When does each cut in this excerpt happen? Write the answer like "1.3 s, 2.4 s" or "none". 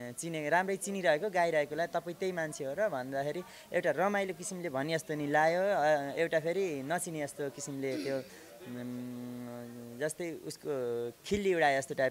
none